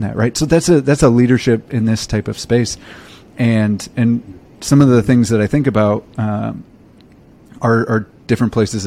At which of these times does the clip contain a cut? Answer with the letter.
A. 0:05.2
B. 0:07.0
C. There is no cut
C